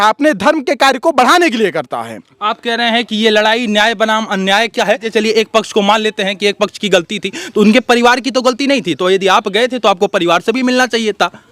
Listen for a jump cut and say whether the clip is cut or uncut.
uncut